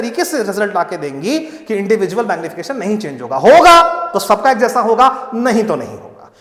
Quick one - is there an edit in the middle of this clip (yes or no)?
no